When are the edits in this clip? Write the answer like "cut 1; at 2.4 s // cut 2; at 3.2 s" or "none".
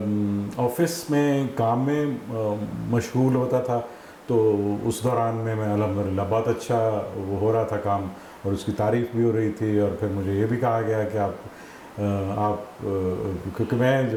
none

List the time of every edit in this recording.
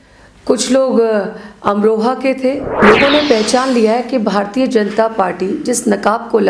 cut 1; at 2.7 s

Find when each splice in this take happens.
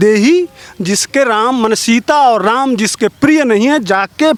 none

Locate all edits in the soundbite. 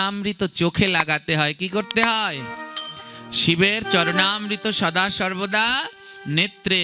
none

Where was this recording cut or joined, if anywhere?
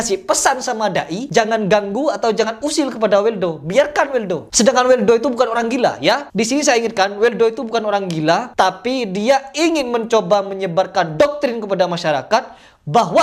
none

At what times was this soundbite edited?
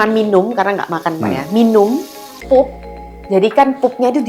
none

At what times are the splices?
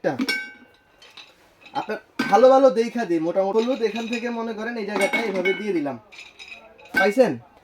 cut 1; at 3.5 s

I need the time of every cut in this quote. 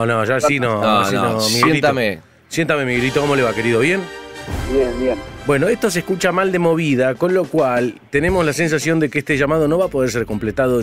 cut 1; at 2.0 s

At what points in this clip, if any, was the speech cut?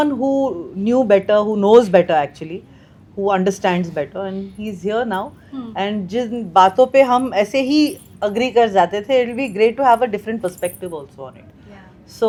none

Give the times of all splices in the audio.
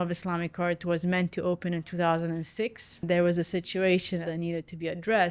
cut 1; at 3.0 s // cut 2; at 4.2 s

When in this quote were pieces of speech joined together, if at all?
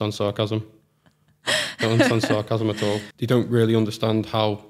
cut 1; at 3.1 s

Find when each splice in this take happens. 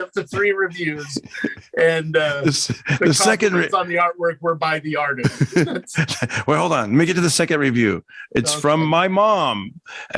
none

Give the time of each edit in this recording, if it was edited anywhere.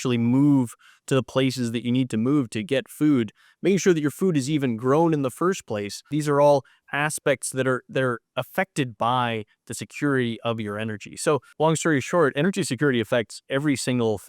cut 1; at 6.1 s // cut 2; at 11.5 s

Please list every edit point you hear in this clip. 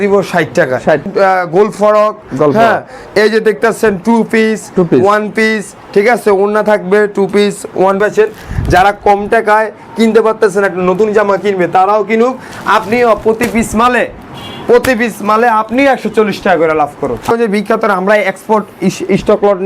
cut 1; at 1.0 s // cut 2; at 8.0 s // cut 3; at 17.3 s

